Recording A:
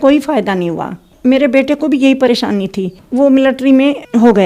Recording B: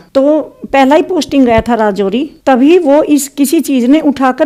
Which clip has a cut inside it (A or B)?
A